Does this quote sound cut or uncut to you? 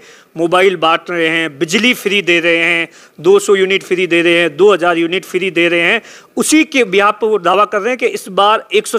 uncut